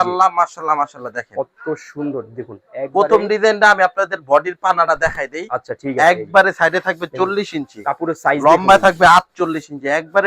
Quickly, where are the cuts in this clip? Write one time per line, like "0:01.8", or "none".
none